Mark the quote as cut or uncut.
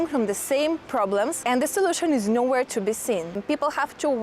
cut